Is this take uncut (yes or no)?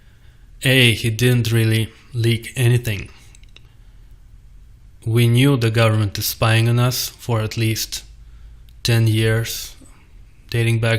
no